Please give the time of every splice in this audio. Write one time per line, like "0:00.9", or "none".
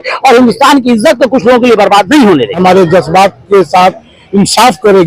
0:02.6

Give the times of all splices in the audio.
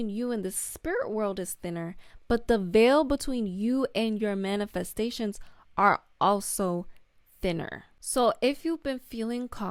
none

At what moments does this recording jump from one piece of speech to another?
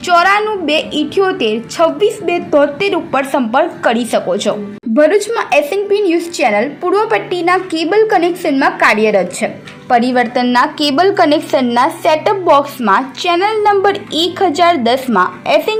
none

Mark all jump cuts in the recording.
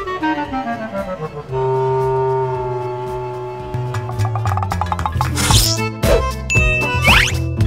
0:05.3

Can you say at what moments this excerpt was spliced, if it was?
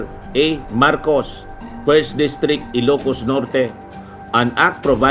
none

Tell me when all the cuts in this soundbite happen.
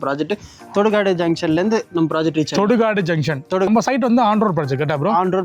0:03.7

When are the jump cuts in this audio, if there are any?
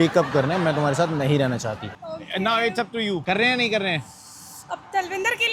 0:01.9
0:03.2

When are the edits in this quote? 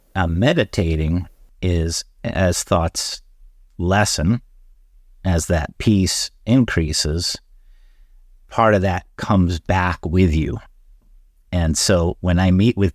0:01.4

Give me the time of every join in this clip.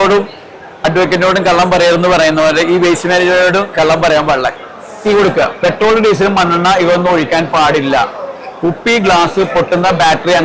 0:04.5

